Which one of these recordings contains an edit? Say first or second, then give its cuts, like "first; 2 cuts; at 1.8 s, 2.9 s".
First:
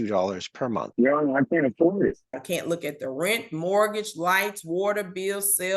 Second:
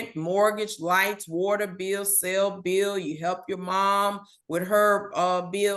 first; 2 cuts; at 0.9 s, 2.4 s